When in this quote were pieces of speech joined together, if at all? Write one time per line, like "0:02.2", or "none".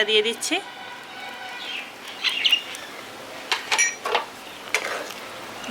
none